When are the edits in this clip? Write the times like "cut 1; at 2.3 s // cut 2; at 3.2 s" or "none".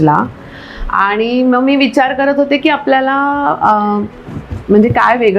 none

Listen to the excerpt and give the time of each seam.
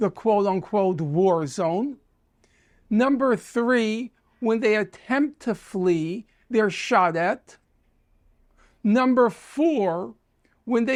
none

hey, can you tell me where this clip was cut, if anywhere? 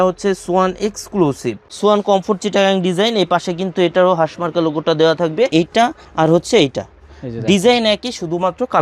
cut 1; at 1.6 s // cut 2; at 5.5 s

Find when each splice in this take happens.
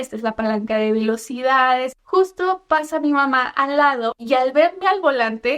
cut 1; at 2.0 s

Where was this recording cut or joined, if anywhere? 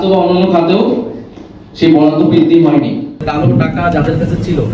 cut 1; at 3.2 s

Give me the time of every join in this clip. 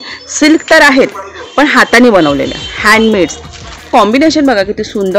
cut 1; at 3.9 s

